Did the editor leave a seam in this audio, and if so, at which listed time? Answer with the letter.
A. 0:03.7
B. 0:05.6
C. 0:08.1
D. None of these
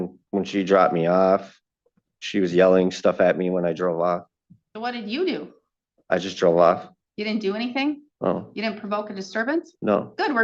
C